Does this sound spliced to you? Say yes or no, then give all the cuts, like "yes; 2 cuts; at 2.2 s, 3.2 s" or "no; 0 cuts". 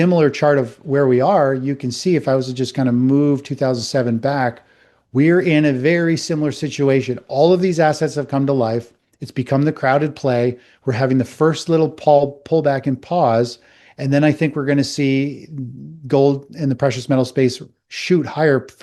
no; 0 cuts